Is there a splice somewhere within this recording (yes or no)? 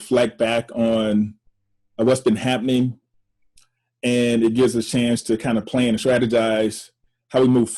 no